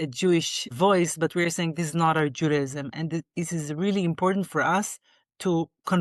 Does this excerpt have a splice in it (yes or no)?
no